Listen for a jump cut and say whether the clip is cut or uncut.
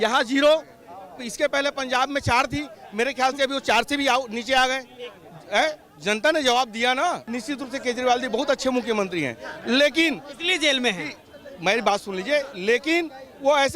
cut